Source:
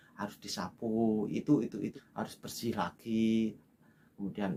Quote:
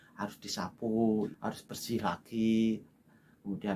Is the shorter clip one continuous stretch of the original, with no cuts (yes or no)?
no